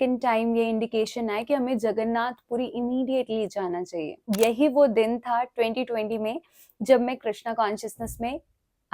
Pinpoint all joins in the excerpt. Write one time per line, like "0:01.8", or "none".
0:04.1